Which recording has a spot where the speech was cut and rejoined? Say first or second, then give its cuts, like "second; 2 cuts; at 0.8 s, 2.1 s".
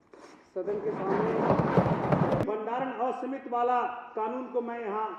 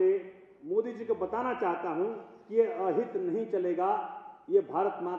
first; 1 cut; at 2.4 s